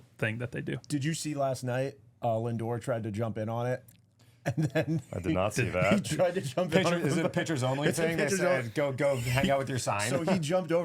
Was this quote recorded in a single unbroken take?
yes; 0 cuts

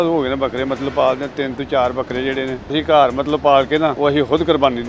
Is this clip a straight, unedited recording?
no; 2 cuts; at 2.7 s, 3.9 s

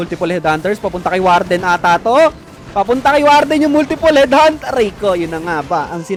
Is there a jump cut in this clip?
no; 0 cuts

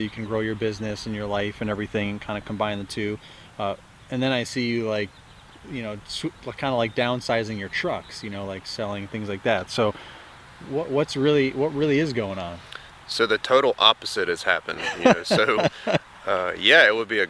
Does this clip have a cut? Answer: no; 0 cuts

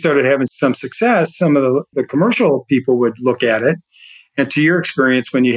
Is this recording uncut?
no; 1 cut; at 1.9 s

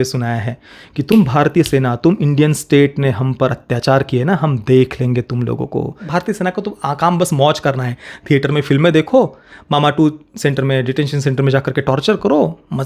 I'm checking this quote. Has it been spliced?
yes; 1 cut; at 6.1 s

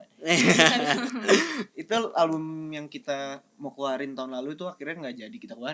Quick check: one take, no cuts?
yes; 0 cuts

